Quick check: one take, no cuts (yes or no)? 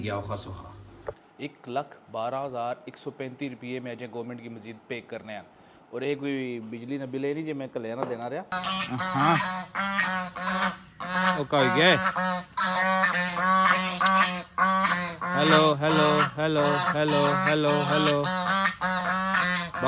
no